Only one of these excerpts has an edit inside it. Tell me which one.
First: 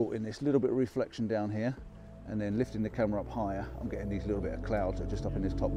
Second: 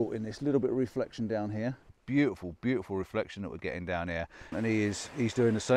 second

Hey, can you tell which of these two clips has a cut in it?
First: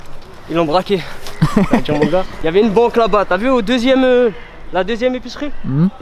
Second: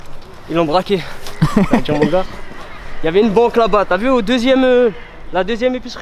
first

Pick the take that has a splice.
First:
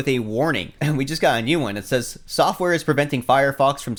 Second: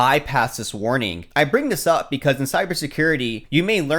second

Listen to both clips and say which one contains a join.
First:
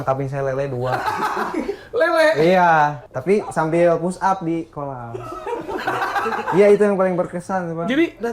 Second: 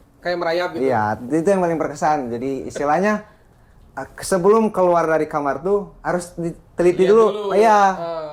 first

